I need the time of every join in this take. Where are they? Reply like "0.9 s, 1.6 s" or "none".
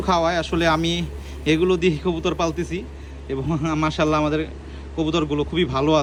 none